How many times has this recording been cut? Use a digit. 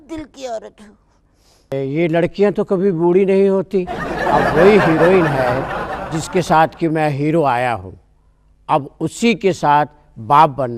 1